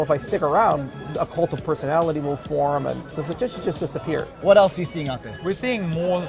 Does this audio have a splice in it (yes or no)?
yes